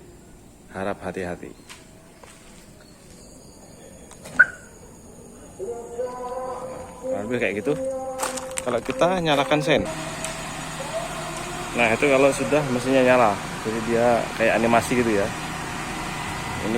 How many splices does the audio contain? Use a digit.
1